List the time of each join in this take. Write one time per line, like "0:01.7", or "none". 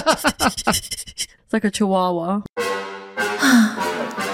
0:01.2
0:02.4